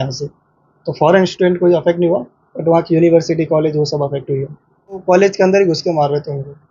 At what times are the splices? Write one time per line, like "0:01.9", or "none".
0:05.0